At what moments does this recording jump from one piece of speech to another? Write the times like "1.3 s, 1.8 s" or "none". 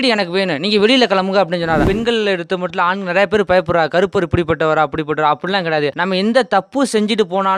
1.8 s, 6.0 s